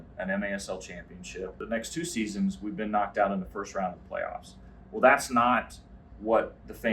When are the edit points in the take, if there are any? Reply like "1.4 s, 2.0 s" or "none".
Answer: 1.5 s